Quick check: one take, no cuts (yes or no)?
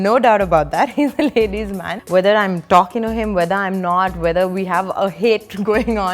no